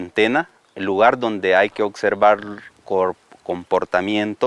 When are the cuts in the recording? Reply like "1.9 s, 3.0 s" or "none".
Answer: none